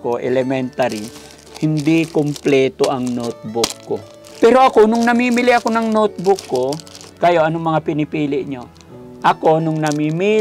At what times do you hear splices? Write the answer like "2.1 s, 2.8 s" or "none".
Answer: 4.2 s

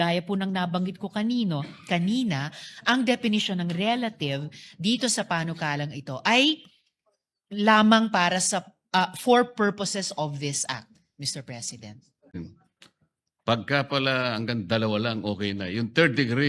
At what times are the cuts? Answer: 12.3 s

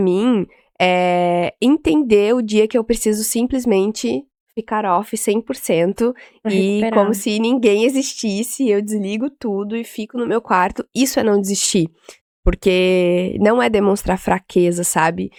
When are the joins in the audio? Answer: none

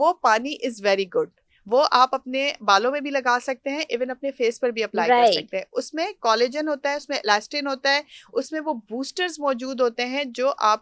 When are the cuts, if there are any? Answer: none

